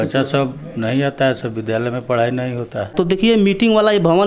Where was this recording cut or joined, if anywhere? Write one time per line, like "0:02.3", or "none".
0:02.9